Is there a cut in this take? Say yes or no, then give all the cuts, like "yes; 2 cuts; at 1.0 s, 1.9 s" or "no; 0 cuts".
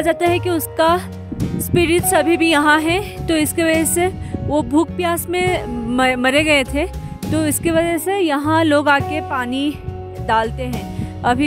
no; 0 cuts